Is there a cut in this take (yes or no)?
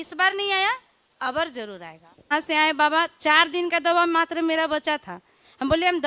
yes